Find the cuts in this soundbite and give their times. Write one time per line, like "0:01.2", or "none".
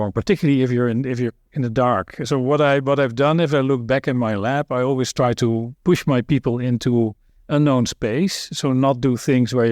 0:05.7